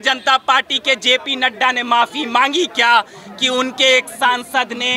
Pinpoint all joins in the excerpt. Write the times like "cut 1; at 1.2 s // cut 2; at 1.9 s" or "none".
none